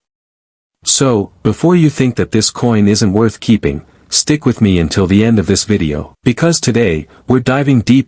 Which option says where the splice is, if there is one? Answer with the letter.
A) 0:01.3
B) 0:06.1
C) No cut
B